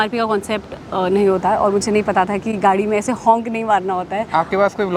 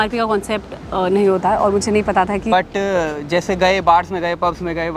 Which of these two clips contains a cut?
second; 1 cut; at 2.5 s

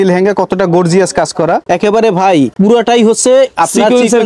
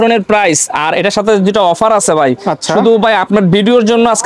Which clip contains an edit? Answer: first; 2 cuts; at 1.6 s, 2.5 s

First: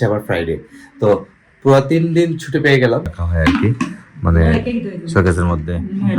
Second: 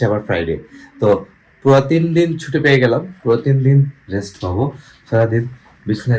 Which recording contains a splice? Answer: first; 1 cut; at 3.2 s

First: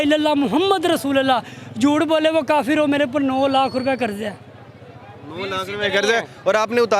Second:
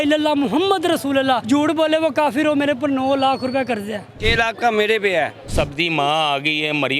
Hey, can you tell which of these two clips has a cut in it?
second; 3 cuts; at 1.4 s, 4.2 s, 5.4 s

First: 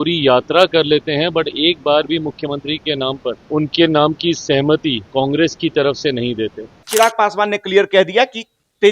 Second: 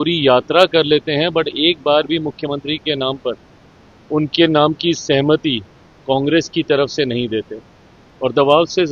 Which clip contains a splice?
first; 3 cuts; at 3.4 s, 5.0 s, 6.8 s

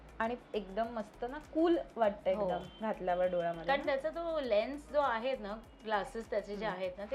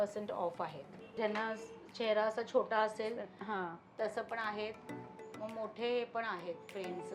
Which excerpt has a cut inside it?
second; 1 cut; at 1.2 s

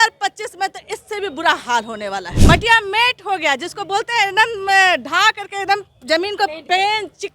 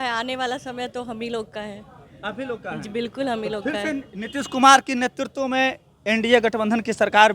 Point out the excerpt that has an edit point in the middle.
first; 1 cut; at 2.3 s

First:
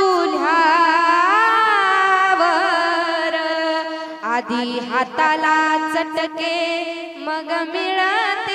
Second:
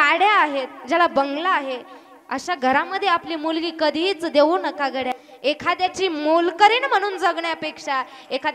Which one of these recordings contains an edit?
second; 1 cut; at 5.2 s

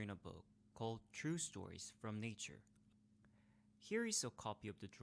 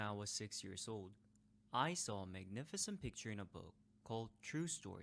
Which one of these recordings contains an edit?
first; 1 cut; at 2.8 s

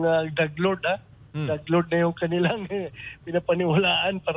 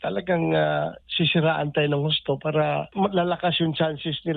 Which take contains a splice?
second; 1 cut; at 2.9 s

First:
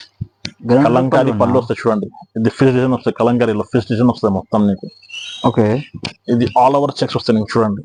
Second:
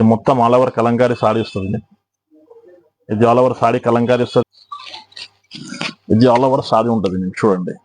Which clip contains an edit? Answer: second; 1 cut; at 4.4 s

